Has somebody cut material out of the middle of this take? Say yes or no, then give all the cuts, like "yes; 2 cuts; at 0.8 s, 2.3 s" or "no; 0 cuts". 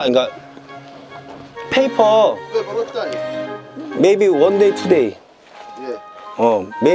no; 0 cuts